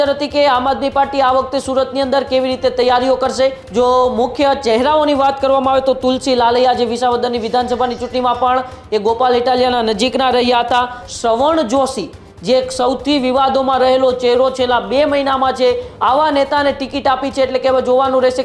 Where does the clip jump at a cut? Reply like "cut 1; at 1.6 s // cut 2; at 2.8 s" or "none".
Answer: cut 1; at 3.6 s // cut 2; at 11.0 s // cut 3; at 15.9 s